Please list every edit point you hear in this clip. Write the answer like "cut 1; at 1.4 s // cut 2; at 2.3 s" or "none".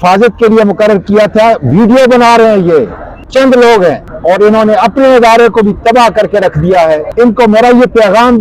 cut 1; at 3.3 s // cut 2; at 4.1 s // cut 3; at 7.1 s